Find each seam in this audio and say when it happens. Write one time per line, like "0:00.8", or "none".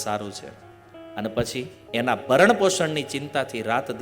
0:01.8